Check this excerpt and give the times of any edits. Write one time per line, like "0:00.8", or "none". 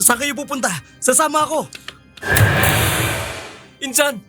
none